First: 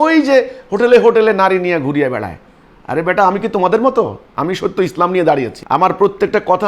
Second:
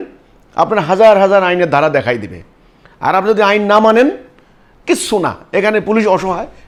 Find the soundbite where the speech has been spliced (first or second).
first